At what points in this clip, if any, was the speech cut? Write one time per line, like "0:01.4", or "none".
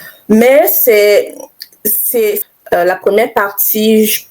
0:02.4